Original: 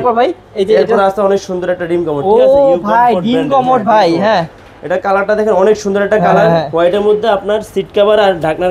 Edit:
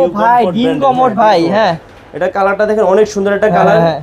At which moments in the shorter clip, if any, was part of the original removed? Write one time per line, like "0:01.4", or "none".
none